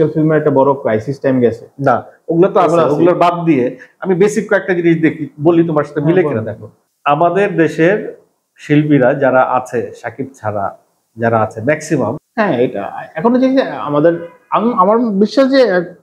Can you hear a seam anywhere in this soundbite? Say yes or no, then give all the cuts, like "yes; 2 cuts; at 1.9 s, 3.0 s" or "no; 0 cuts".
yes; 1 cut; at 12.2 s